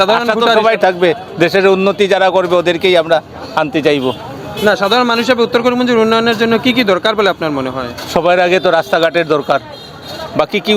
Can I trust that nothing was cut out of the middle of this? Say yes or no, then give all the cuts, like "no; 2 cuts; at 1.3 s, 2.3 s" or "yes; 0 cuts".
yes; 0 cuts